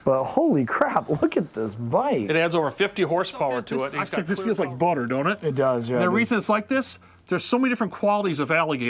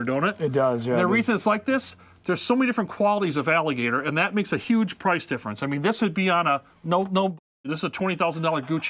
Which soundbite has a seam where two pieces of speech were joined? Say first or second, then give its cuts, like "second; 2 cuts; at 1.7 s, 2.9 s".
first; 1 cut; at 4.0 s